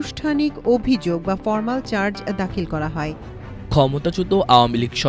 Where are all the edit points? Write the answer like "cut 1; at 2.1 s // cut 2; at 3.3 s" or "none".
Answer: cut 1; at 3.0 s